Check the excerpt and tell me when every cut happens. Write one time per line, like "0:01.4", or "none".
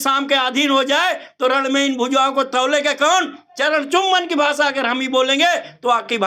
none